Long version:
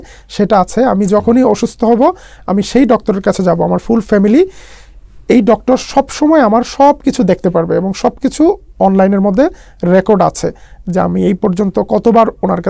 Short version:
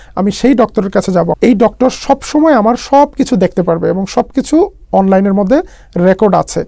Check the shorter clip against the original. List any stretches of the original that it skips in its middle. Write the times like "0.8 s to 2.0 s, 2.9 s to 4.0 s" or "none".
3.6 s to 5.2 s